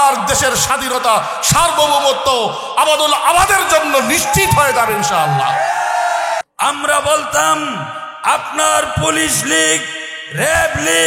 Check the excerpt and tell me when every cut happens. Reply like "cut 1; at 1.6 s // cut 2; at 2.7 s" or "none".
cut 1; at 6.5 s